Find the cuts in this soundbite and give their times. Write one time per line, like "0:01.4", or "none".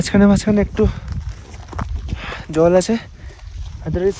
none